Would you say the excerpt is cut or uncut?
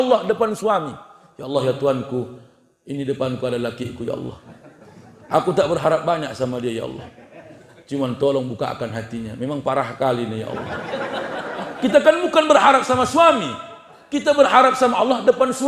uncut